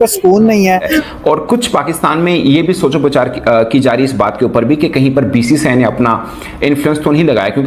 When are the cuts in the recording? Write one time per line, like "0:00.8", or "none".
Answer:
0:01.0